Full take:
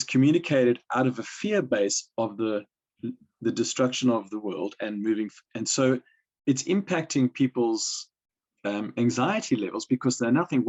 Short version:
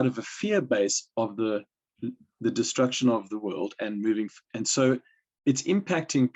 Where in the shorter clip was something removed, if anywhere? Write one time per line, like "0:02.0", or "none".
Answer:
none